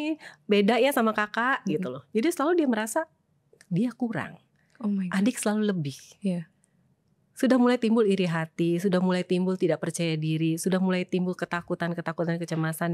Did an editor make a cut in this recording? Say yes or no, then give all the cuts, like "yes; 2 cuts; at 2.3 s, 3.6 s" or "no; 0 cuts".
no; 0 cuts